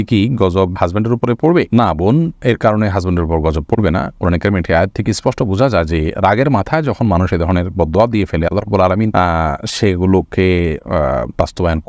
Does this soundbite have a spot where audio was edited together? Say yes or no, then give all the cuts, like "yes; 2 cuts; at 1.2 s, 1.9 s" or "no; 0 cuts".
no; 0 cuts